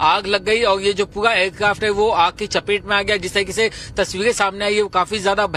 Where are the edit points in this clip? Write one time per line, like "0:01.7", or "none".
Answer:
none